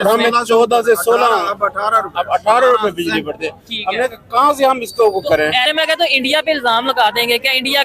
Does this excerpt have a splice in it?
yes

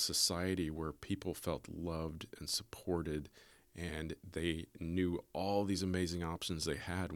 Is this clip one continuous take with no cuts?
yes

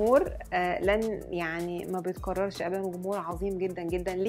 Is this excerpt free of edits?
yes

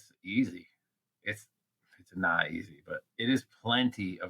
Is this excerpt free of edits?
no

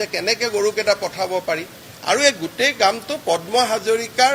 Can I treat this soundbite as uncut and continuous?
yes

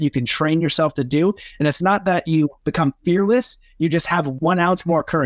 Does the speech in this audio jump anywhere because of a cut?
yes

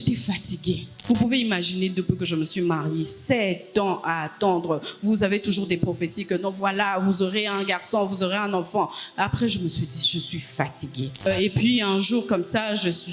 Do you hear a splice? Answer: yes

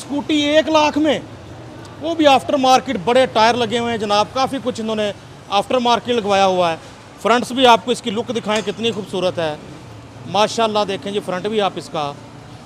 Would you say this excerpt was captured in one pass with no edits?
yes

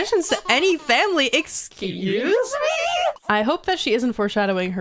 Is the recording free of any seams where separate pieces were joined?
no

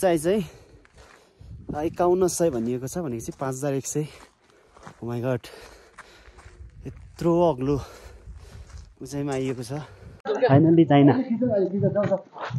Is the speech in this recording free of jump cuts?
no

